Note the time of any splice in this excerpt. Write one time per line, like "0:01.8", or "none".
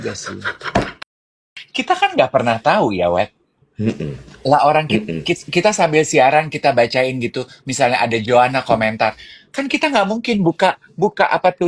0:01.5